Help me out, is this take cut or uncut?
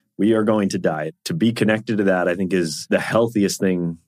cut